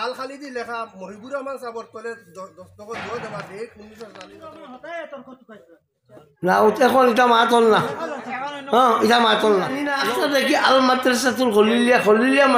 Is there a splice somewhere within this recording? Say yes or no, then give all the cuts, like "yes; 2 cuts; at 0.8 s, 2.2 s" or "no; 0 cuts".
yes; 2 cuts; at 4.4 s, 9.9 s